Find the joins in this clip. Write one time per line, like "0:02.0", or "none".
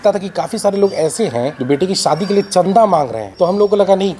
0:01.6
0:03.2